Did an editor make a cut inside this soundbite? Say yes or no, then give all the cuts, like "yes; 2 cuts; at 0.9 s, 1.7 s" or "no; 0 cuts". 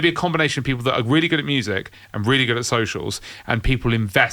no; 0 cuts